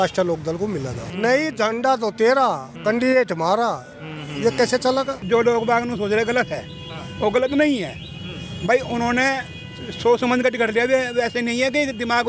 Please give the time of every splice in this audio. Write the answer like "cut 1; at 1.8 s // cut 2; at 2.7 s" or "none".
cut 1; at 1.1 s // cut 2; at 5.2 s